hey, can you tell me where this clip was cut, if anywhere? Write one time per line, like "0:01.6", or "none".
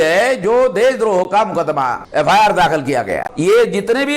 0:02.0
0:03.3